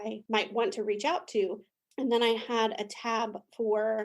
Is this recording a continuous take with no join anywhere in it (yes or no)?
no